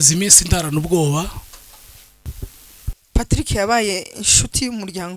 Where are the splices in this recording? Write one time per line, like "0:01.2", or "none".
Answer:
0:03.0